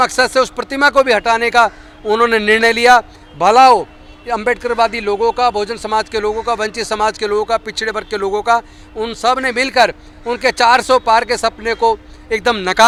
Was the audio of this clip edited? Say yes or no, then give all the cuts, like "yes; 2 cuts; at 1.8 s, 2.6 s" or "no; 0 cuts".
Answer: no; 0 cuts